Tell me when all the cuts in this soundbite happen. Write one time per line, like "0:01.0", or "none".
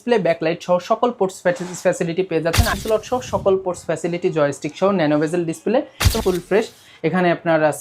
0:02.7
0:06.1